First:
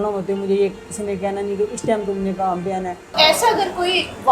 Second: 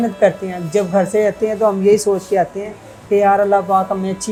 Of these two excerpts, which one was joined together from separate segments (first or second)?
first